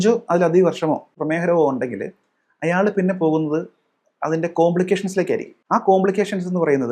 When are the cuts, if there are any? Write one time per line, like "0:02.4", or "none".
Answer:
0:01.2
0:05.5